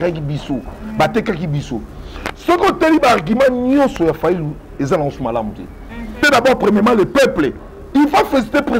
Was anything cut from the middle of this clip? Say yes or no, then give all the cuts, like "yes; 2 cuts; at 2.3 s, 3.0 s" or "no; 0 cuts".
yes; 1 cut; at 6.2 s